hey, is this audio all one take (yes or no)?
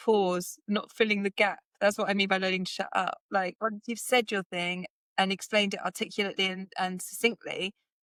yes